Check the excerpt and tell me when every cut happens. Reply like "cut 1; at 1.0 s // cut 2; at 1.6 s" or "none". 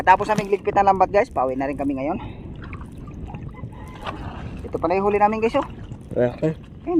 none

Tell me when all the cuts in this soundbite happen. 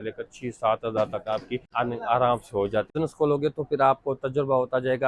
cut 1; at 1.6 s // cut 2; at 2.9 s

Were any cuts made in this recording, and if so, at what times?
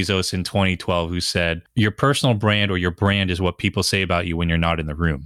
none

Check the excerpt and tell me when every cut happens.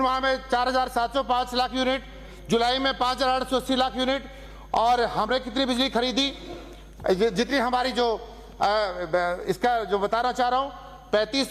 none

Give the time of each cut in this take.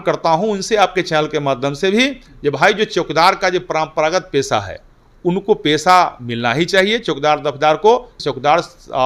cut 1; at 8.1 s

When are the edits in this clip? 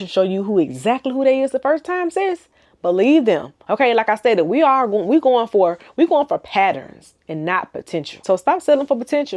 none

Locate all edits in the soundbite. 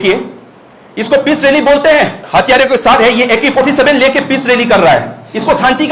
cut 1; at 2.2 s

